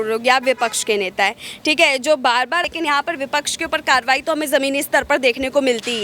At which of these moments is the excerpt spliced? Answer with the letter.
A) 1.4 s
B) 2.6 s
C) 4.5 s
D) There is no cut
B